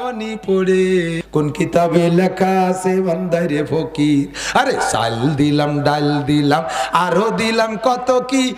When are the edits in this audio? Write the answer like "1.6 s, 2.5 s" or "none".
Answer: 1.2 s